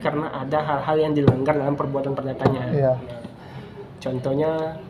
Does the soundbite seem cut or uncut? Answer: uncut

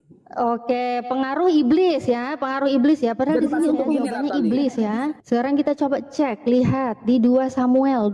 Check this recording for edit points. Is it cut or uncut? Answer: cut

